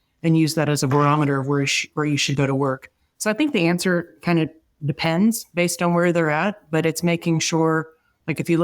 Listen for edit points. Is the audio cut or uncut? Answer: uncut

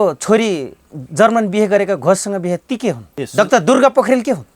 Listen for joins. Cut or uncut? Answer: cut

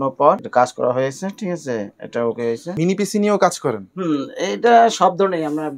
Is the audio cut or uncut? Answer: uncut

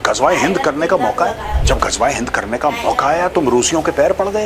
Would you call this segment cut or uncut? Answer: cut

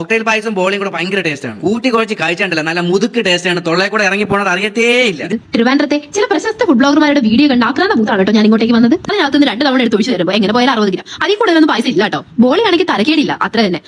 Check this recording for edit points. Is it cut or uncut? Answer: cut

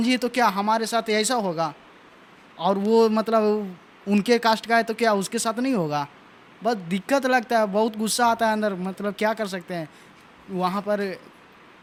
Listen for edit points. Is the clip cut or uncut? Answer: uncut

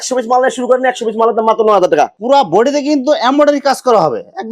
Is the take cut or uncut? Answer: cut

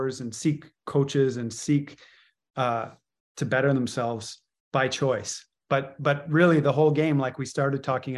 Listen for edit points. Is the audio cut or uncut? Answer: uncut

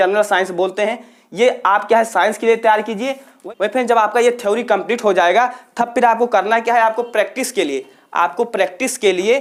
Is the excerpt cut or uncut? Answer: uncut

